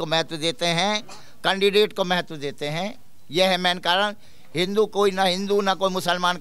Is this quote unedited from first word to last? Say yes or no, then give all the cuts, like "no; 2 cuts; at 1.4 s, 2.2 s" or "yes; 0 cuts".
yes; 0 cuts